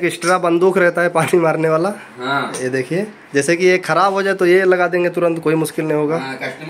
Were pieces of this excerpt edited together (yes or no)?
no